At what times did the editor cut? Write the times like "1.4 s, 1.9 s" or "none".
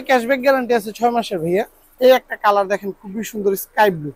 1.8 s